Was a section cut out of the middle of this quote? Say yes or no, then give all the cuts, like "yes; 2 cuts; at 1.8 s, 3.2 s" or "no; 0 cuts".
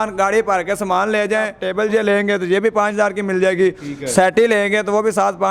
yes; 1 cut; at 1.6 s